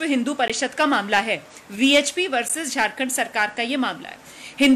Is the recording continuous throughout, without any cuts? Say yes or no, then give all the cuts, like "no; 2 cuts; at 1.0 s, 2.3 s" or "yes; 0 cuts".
yes; 0 cuts